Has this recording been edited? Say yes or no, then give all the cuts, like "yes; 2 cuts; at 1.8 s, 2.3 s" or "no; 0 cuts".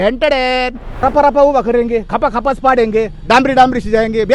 yes; 1 cut; at 1.0 s